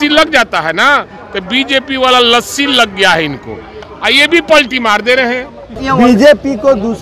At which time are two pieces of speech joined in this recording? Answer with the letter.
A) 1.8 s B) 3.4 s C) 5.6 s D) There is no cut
D